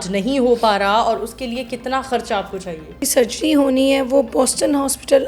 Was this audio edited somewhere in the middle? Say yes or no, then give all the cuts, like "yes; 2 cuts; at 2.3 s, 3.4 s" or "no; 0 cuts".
yes; 1 cut; at 3.0 s